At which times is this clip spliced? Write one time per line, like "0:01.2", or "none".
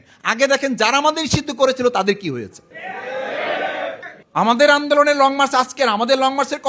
0:04.1